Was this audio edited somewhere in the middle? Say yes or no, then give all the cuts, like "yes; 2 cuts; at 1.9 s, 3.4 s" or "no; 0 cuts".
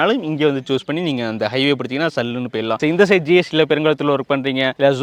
no; 0 cuts